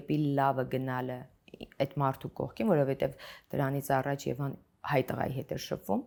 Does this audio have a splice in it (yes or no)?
no